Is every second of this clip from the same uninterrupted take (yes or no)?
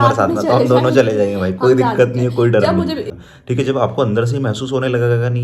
no